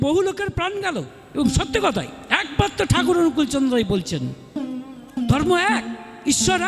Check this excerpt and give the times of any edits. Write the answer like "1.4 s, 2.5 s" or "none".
1.2 s